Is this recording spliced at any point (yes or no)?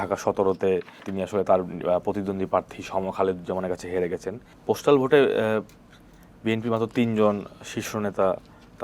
yes